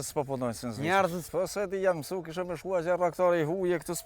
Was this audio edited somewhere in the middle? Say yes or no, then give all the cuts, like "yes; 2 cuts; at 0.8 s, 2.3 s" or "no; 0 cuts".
yes; 1 cut; at 1.2 s